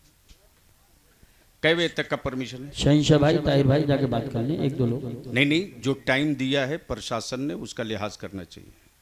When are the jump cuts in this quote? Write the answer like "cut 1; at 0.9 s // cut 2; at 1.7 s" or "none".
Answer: none